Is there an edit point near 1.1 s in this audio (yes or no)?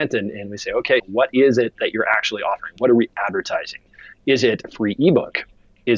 yes